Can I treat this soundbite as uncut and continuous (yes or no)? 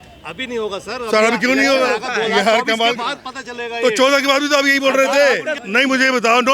no